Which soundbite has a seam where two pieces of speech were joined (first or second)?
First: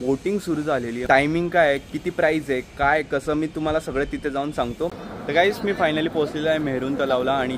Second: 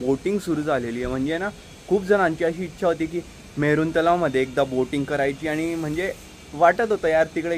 first